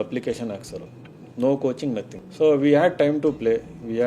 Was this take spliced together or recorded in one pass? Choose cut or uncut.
cut